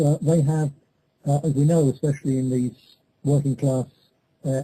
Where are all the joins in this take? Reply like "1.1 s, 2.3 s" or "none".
none